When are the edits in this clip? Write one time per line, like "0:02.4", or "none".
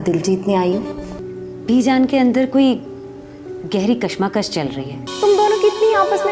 0:01.2
0:05.0

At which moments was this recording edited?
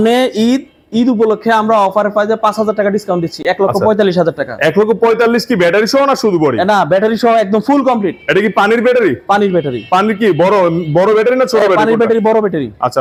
none

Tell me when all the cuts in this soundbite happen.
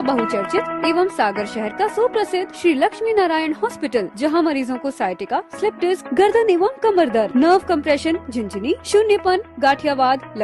none

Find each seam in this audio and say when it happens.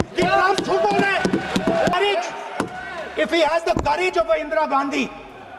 0:01.9

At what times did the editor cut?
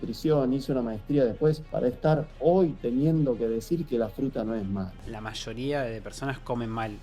0:01.7
0:05.1

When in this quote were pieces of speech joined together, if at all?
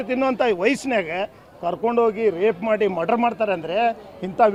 none

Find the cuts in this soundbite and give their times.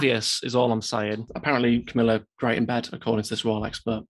0:01.3

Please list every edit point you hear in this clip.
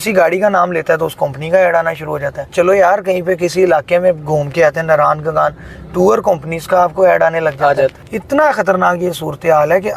0:02.5
0:08.1

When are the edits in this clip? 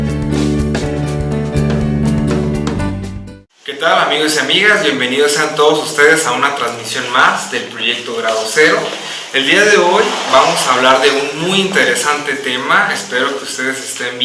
none

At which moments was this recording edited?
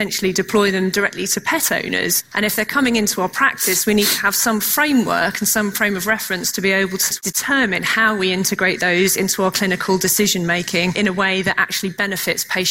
0:02.2
0:07.0
0:11.0

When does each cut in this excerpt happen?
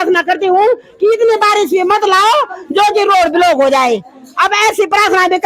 none

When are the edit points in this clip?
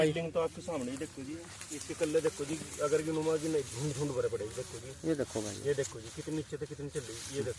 none

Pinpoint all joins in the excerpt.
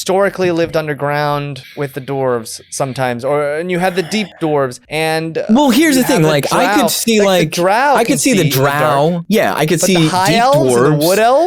0:01.6
0:04.5
0:09.2

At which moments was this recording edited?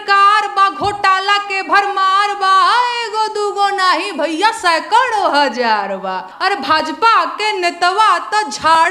0:06.3

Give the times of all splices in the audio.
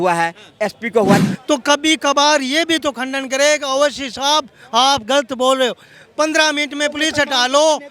0:01.2

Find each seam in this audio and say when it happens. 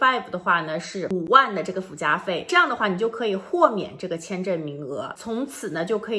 0:02.5
0:05.1

